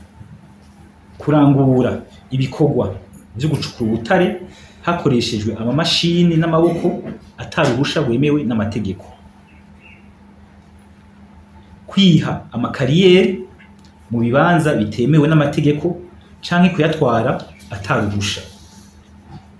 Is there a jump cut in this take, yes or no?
no